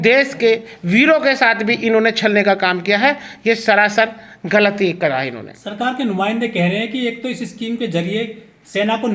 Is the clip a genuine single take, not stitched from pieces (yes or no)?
yes